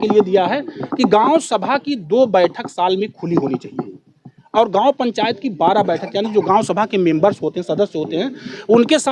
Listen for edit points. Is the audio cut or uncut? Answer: uncut